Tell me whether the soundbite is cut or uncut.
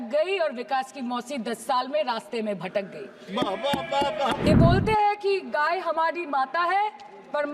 cut